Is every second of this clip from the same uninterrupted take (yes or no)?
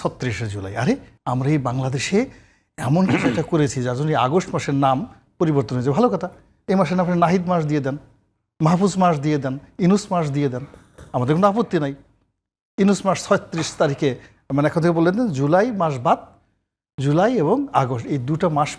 no